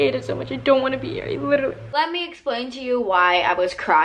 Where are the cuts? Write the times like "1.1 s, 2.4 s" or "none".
1.9 s